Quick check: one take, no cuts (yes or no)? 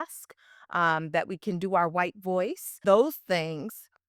no